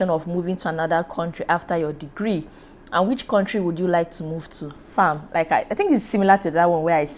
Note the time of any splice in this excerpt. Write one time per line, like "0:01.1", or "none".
none